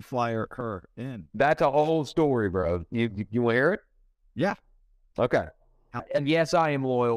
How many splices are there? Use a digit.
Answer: 1